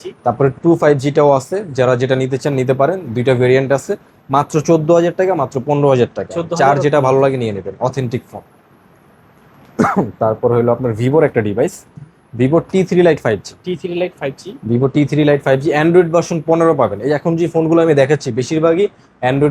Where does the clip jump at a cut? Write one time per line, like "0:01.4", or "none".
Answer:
none